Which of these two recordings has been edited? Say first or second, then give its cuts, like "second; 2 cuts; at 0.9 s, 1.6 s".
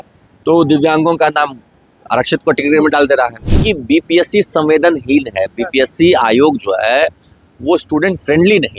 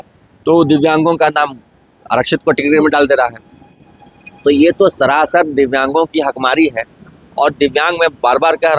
first; 1 cut; at 3.5 s